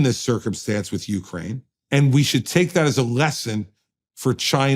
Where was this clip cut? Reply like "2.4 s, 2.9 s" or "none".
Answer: 1.7 s